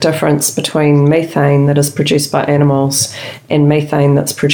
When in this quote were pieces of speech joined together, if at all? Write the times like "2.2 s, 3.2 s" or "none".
none